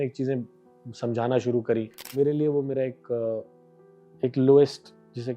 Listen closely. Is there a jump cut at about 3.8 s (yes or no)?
no